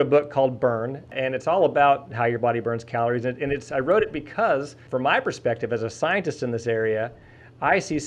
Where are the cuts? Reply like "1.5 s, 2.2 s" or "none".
1.1 s, 4.8 s